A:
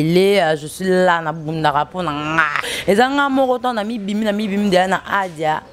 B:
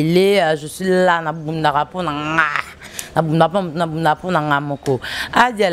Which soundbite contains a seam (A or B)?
A